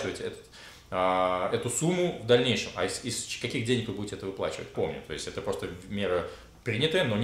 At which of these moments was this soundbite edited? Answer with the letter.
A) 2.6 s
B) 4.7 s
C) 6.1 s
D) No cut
B